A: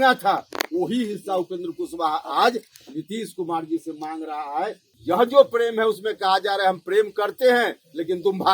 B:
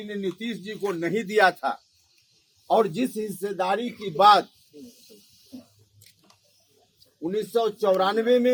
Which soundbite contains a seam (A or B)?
A